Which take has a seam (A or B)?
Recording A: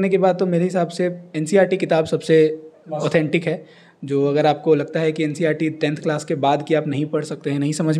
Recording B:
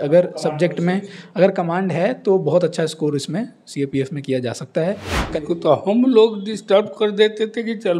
B